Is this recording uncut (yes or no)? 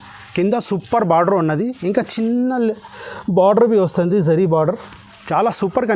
yes